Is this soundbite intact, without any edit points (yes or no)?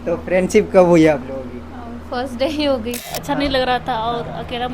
no